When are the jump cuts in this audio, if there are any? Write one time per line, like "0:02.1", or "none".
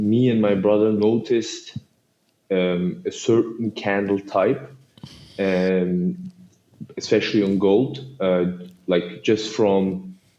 none